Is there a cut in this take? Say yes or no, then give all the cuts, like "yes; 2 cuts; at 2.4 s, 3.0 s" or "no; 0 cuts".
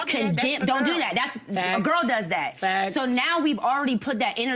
no; 0 cuts